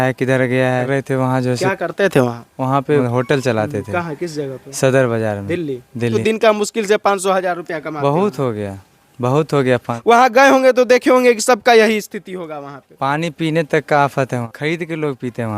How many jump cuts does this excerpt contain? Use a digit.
5